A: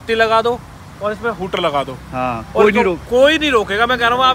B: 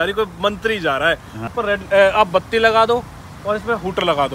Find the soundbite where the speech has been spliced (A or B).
B